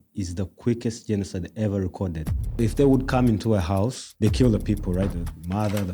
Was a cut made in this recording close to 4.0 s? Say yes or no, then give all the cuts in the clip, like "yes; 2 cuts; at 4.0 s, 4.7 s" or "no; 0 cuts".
yes; 3 cuts; at 2.6 s, 4.0 s, 5.1 s